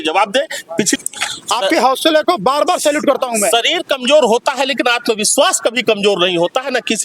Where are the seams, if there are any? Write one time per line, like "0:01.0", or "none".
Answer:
0:01.0